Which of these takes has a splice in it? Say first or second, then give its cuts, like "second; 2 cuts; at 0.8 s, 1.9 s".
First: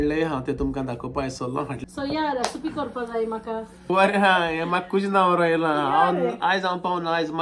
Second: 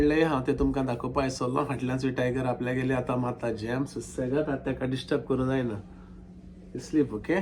first; 2 cuts; at 1.8 s, 3.9 s